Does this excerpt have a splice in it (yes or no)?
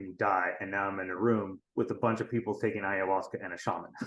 yes